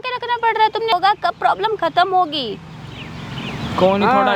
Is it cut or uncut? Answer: cut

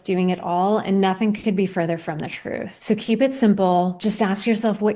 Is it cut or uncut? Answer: cut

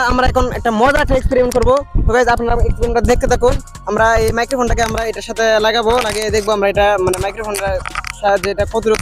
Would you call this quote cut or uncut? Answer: uncut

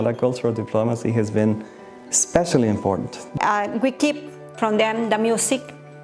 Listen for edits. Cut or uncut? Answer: cut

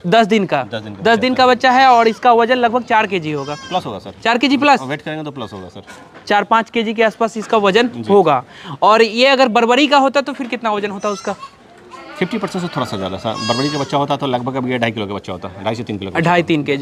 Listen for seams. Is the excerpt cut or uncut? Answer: uncut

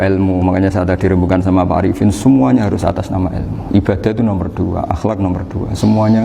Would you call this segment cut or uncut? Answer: uncut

